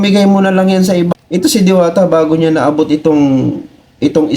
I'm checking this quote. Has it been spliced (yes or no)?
yes